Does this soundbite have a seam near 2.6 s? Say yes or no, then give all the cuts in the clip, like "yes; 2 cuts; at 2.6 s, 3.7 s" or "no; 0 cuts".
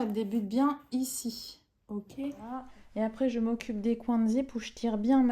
yes; 1 cut; at 2.6 s